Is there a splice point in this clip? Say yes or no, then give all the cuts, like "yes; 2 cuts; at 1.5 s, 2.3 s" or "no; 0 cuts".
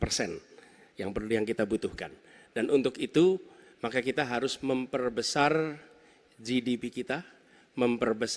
no; 0 cuts